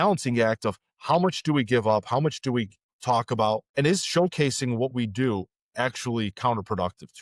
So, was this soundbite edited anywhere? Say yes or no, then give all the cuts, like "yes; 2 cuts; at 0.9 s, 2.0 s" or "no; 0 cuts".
yes; 2 cuts; at 2.9 s, 3.7 s